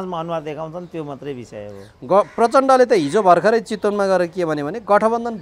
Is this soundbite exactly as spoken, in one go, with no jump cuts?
yes; 0 cuts

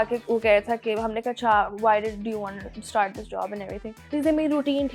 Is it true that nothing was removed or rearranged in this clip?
no; 1 cut; at 3.9 s

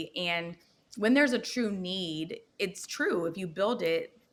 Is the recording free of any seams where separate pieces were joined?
yes; 0 cuts

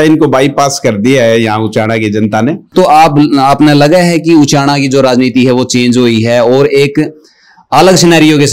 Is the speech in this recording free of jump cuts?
no; 1 cut; at 2.7 s

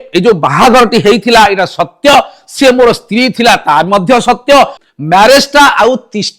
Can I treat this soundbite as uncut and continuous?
no; 1 cut; at 4.8 s

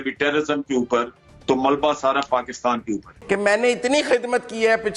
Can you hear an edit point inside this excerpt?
yes; 1 cut; at 3.1 s

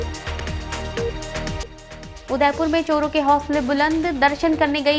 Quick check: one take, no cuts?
no; 1 cut; at 1.6 s

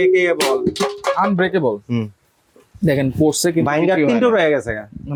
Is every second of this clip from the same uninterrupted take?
yes; 0 cuts

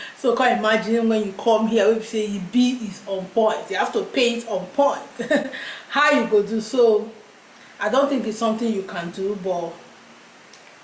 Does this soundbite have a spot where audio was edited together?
no; 0 cuts

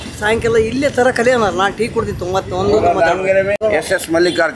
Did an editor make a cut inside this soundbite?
yes; 1 cut; at 3.6 s

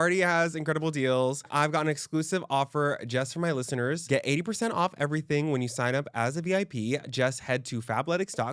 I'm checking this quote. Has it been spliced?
yes; 2 cuts; at 1.5 s, 4.0 s

